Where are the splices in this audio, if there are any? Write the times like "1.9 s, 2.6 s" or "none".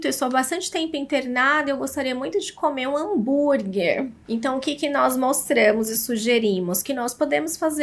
4.2 s